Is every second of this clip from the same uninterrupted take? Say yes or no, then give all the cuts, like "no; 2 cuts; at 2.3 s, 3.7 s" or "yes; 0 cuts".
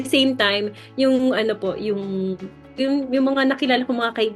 no; 1 cut; at 2.8 s